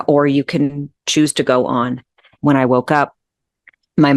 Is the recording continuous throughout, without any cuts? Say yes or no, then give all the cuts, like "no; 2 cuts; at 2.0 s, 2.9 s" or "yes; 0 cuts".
no; 1 cut; at 2.4 s